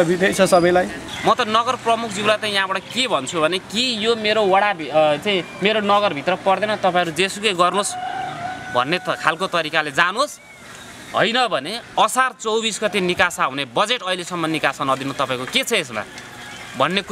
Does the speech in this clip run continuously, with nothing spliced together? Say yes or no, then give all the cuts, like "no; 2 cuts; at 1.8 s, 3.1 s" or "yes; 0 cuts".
no; 1 cut; at 1.0 s